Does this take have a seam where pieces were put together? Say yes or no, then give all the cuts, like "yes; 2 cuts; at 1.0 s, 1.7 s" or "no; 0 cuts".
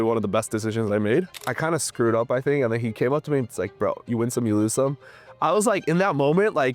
yes; 1 cut; at 1.4 s